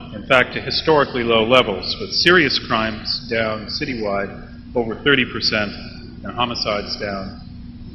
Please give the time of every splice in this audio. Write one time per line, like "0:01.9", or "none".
0:05.3